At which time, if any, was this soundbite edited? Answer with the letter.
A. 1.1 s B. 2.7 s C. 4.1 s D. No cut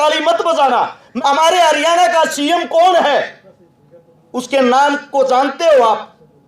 A